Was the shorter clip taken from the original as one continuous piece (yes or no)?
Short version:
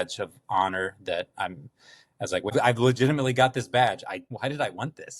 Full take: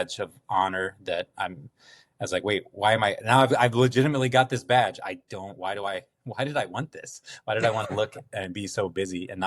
no